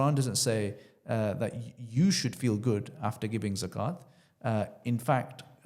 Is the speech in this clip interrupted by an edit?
no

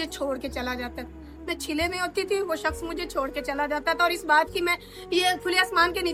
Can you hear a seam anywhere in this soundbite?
no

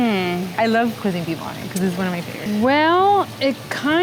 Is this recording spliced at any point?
yes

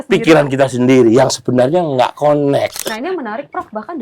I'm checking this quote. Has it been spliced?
yes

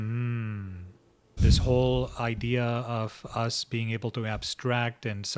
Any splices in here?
yes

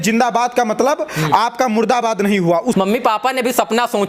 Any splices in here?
yes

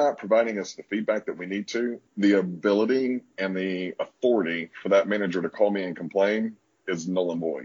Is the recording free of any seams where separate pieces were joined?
no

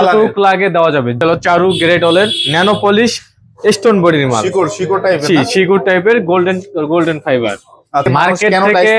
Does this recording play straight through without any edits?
no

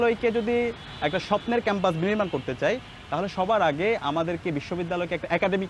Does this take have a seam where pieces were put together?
no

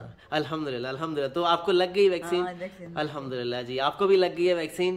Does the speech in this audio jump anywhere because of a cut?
no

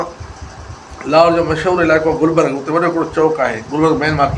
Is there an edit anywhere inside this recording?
no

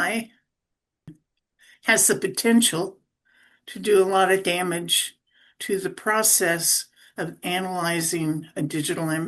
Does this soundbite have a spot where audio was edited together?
no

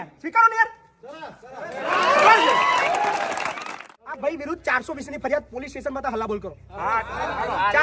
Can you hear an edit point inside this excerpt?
yes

